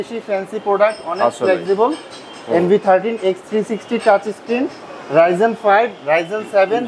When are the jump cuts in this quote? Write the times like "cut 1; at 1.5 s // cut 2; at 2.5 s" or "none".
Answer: none